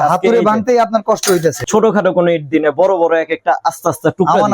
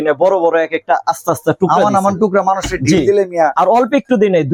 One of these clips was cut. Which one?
first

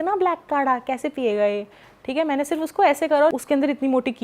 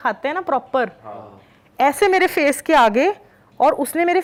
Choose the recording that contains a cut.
first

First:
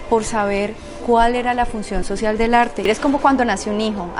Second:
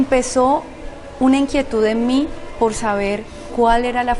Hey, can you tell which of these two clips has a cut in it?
first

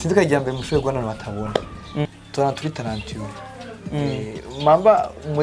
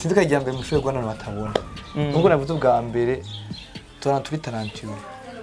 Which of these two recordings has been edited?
first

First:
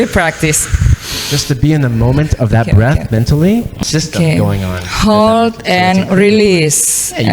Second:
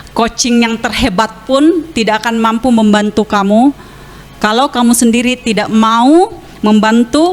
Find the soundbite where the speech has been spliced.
first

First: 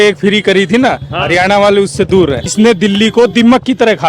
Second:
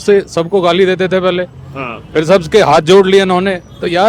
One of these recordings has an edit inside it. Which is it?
first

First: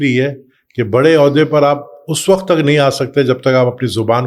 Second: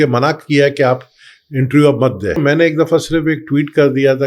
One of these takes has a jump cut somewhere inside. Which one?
second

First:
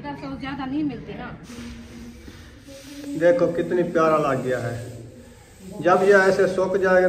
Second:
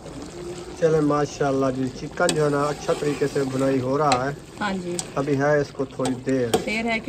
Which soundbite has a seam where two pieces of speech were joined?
first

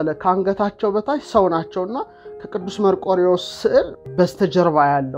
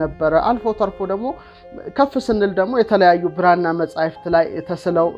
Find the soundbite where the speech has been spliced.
first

